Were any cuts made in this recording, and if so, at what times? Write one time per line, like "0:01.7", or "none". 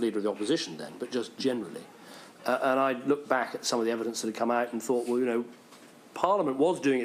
none